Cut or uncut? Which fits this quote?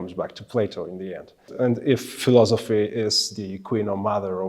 cut